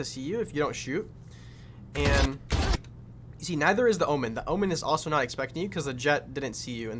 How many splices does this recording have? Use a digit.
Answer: 0